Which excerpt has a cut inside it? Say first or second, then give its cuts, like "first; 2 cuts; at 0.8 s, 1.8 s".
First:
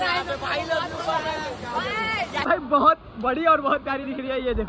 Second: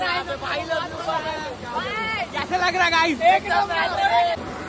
first; 1 cut; at 2.5 s